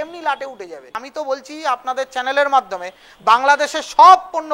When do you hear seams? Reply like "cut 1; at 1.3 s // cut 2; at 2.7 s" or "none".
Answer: cut 1; at 1.1 s

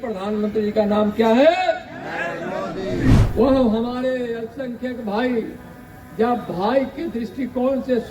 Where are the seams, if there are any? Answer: cut 1; at 3.2 s

